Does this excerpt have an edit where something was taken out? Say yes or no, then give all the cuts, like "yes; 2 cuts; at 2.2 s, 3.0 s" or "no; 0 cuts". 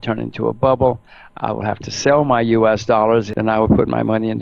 yes; 1 cut; at 3.3 s